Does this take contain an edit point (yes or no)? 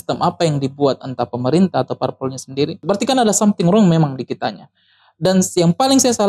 yes